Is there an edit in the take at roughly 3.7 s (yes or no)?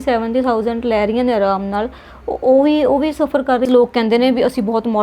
yes